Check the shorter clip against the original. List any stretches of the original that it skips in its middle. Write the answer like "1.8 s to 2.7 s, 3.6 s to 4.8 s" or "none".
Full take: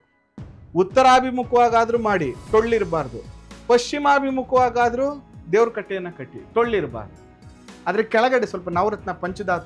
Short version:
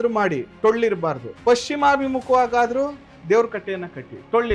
3.2 s to 3.5 s